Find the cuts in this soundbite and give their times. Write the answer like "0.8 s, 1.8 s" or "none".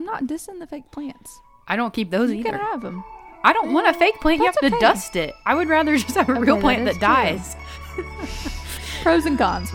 8.8 s